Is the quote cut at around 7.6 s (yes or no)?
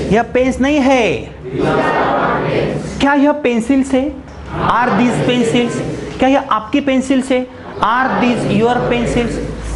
no